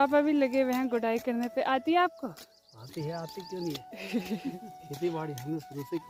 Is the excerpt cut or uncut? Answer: uncut